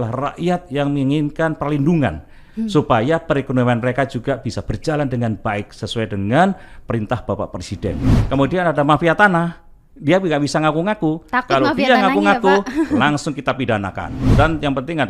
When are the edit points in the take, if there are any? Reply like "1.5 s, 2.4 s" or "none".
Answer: 8.2 s, 14.1 s